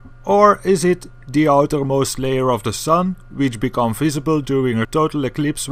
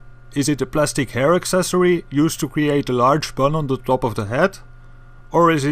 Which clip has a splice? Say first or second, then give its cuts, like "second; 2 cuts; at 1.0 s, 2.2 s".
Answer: second; 1 cut; at 1.6 s